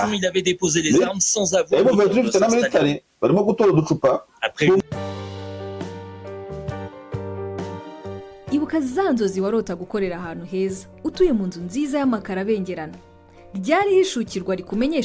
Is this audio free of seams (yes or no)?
no